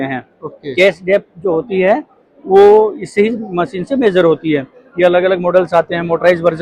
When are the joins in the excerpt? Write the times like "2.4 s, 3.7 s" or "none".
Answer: none